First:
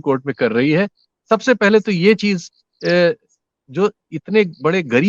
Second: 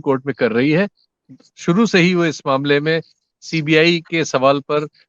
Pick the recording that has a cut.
second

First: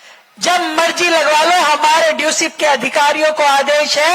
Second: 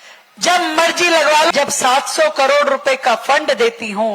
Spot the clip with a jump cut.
second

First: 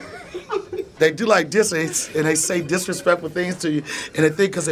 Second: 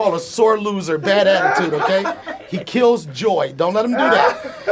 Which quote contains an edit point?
second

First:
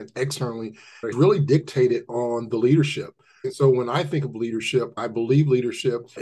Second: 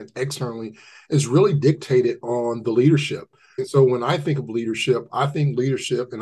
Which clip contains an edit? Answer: first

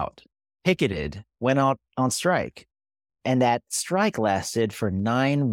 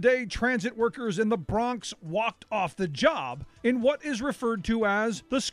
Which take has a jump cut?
first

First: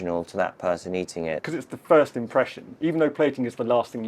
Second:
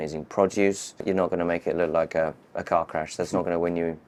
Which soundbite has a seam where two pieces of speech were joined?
first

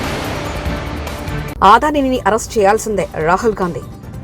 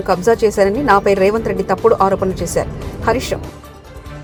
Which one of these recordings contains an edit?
first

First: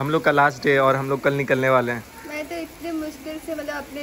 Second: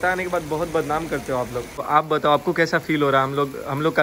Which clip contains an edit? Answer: second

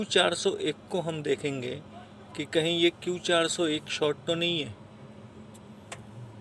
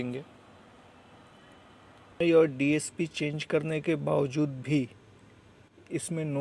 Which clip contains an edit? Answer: second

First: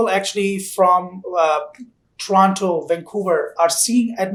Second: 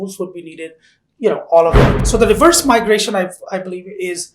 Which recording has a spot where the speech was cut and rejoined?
second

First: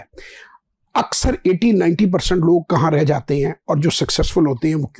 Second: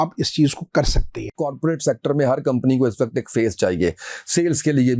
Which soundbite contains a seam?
second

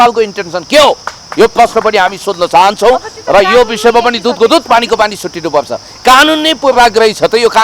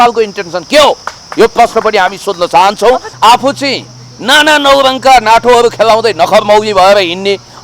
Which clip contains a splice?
second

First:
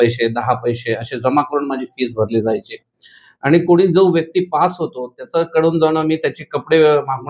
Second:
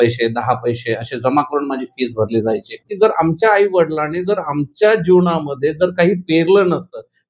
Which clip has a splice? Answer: second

